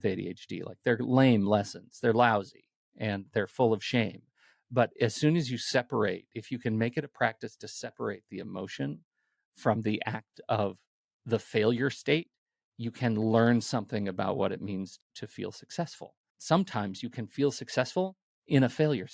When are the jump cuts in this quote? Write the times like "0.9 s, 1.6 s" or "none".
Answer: 15.0 s, 16.3 s